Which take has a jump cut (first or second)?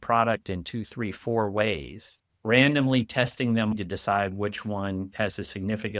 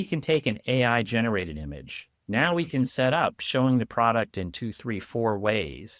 first